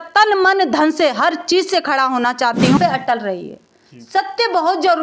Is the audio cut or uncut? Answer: cut